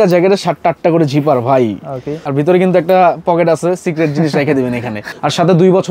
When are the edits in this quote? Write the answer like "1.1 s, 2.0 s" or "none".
2.2 s, 5.0 s